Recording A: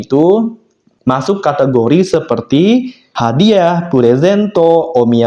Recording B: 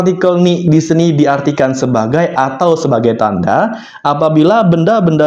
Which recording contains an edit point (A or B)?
A